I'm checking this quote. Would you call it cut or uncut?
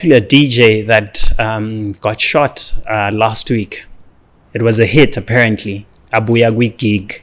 uncut